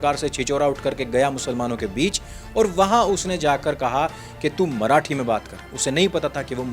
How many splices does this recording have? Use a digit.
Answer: 0